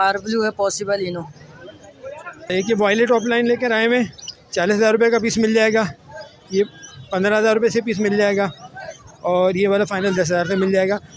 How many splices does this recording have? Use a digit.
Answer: 1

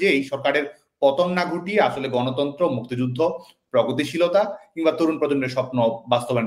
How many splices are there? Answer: 0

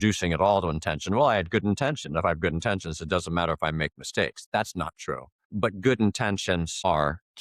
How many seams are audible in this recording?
0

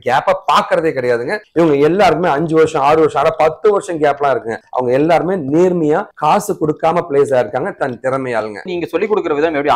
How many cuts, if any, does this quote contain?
2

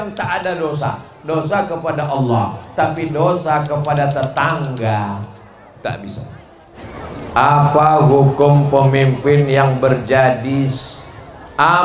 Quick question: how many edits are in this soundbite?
1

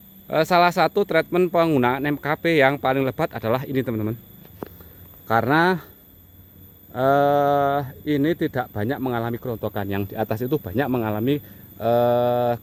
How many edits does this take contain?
0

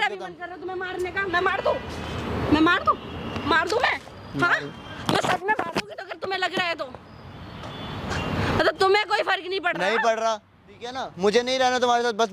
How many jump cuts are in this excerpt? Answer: 0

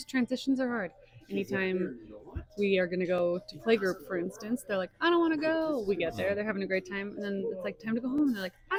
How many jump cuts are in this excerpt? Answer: 0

